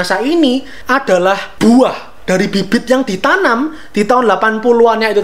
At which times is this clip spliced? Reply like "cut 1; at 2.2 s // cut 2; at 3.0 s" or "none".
none